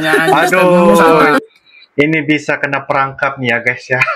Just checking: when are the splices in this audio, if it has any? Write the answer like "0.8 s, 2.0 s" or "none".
none